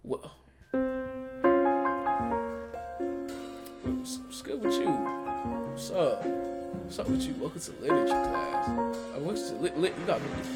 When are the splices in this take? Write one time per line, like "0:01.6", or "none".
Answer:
none